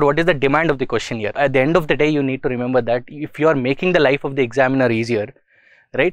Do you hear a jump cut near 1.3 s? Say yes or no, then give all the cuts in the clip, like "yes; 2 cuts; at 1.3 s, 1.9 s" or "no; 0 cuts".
yes; 1 cut; at 1.3 s